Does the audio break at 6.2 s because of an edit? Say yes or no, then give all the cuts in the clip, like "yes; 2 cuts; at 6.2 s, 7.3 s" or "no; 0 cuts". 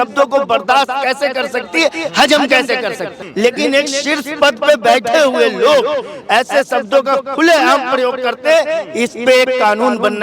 no; 1 cut; at 3.2 s